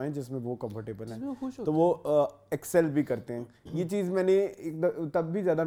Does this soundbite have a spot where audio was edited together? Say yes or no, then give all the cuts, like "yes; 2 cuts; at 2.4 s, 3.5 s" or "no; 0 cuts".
no; 0 cuts